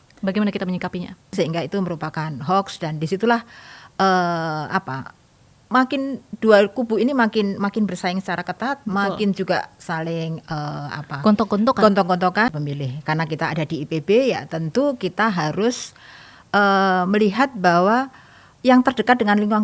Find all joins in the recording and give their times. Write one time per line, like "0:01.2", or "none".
0:01.3
0:12.5